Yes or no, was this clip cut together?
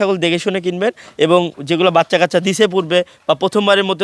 no